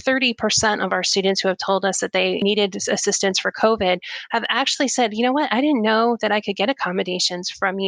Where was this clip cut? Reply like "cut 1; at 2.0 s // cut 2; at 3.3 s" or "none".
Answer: cut 1; at 2.4 s